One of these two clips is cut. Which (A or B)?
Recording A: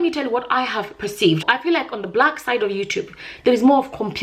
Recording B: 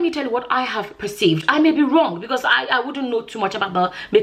A